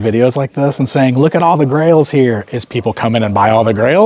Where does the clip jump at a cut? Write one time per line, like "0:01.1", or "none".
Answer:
none